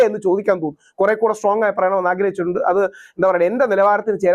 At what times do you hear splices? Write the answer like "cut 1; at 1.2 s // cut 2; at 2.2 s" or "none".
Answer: none